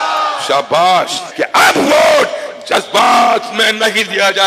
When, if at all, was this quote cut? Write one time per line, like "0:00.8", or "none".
0:01.2